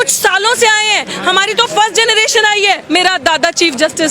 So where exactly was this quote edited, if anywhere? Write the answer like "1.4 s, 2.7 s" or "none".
2.8 s